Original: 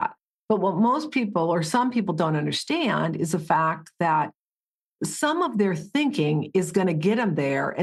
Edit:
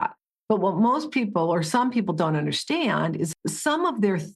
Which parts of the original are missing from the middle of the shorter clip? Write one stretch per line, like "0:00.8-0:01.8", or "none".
0:03.3-0:04.9